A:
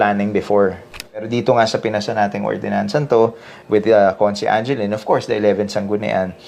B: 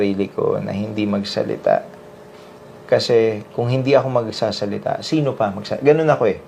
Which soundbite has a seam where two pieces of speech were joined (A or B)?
A